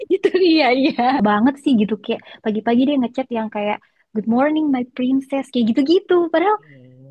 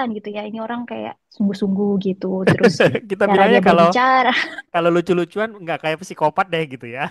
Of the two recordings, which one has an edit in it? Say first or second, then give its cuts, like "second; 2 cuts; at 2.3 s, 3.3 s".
first; 1 cut; at 1.2 s